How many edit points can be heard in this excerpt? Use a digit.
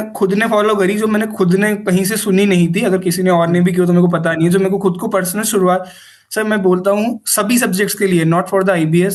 0